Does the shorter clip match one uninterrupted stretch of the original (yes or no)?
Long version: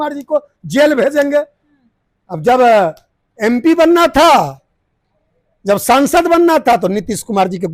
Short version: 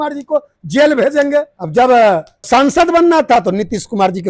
no